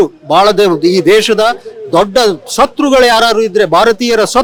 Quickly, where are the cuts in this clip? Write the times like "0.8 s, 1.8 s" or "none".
none